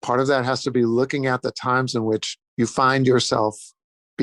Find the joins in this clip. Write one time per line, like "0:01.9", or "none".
0:02.4